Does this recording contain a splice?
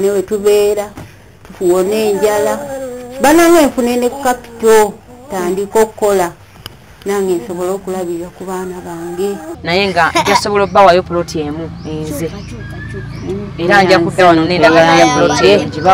yes; 1 cut; at 9.6 s

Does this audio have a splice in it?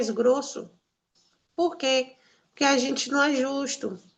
no; 0 cuts

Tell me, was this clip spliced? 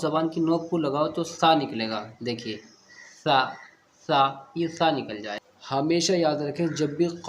yes; 1 cut; at 5.4 s

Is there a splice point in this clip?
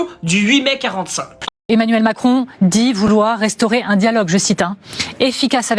yes; 1 cut; at 1.4 s

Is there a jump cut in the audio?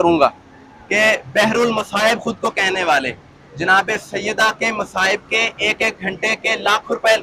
no; 0 cuts

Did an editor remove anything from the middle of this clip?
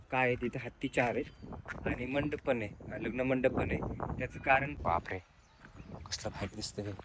yes; 1 cut; at 4.7 s

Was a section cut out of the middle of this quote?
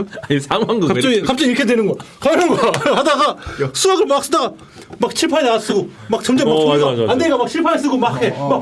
no; 0 cuts

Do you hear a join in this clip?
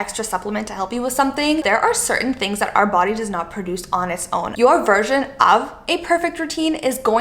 yes; 2 cuts; at 1.6 s, 4.5 s

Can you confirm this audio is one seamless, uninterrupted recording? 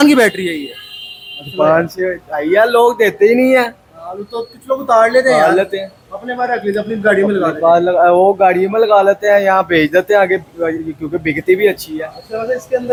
yes; 0 cuts

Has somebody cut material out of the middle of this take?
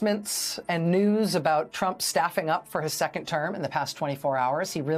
no; 0 cuts

